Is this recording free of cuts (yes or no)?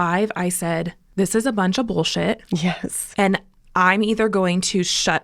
no